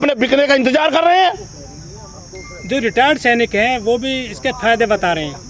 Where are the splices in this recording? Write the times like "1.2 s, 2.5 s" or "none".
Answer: none